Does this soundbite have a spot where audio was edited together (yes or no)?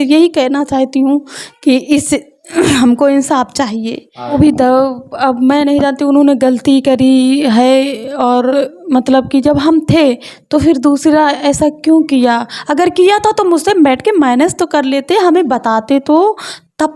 yes